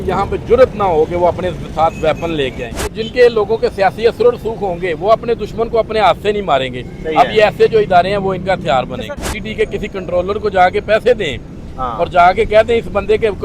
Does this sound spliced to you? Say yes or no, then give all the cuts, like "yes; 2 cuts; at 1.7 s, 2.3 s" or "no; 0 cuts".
yes; 2 cuts; at 2.9 s, 9.2 s